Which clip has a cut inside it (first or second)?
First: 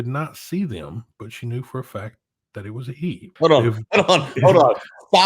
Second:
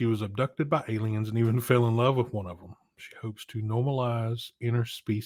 first